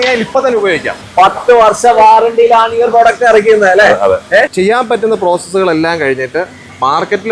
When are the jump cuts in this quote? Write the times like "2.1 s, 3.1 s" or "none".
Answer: 1.0 s, 4.5 s